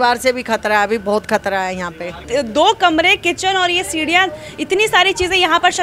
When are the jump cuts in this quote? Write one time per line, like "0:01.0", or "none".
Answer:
0:02.2